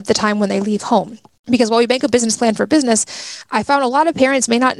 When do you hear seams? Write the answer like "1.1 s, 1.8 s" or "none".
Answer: none